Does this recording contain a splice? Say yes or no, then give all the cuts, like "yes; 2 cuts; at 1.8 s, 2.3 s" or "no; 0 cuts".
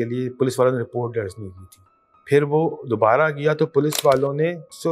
no; 0 cuts